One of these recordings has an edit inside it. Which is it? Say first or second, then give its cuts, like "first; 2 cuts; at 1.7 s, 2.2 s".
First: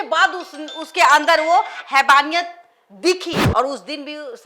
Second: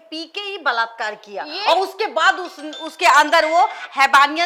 first; 1 cut; at 3.4 s